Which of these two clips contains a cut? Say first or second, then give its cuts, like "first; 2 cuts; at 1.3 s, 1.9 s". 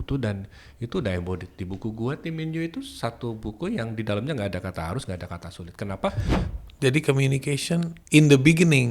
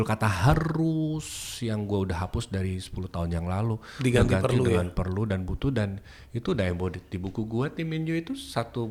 first; 2 cuts; at 6.5 s, 8.0 s